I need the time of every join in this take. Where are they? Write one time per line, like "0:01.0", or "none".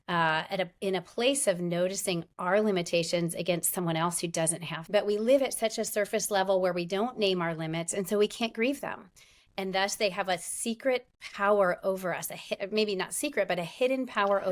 0:04.7